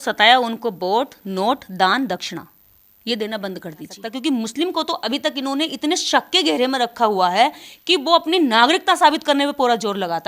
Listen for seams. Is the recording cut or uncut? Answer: cut